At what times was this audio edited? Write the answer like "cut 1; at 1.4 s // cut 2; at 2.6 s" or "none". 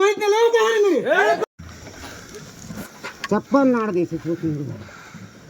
cut 1; at 1.6 s